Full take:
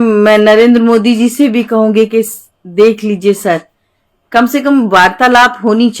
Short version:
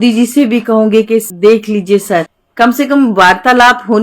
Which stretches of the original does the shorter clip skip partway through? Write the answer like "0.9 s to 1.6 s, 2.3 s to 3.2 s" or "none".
2.3 s to 2.7 s, 3.7 s to 4.1 s